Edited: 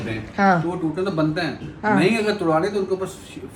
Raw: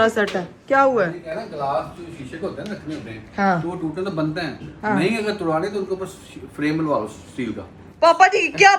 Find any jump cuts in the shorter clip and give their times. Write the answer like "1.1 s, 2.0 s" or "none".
none